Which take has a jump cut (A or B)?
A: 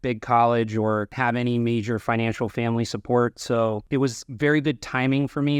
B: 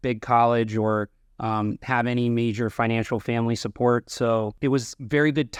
A